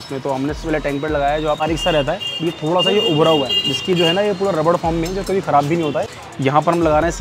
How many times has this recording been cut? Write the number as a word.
two